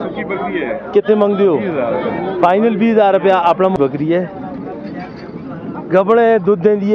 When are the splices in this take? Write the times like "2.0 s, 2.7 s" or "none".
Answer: 3.8 s